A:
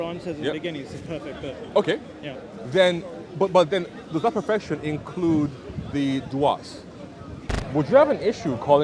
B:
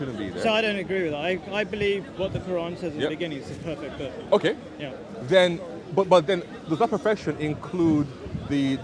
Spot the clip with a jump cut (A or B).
A